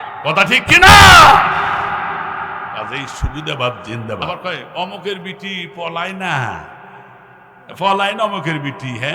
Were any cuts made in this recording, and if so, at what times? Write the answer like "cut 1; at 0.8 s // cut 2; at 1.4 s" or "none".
cut 1; at 4.2 s